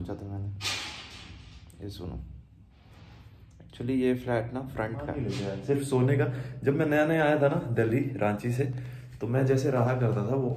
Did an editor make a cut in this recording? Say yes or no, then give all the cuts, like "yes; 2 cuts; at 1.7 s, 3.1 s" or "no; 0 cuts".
yes; 1 cut; at 5.3 s